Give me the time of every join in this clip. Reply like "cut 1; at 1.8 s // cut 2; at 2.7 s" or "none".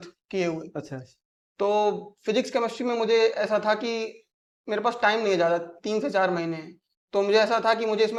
none